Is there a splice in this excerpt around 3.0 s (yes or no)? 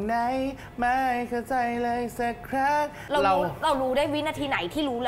yes